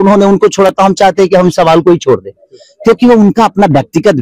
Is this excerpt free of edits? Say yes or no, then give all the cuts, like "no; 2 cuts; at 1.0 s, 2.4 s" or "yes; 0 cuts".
yes; 0 cuts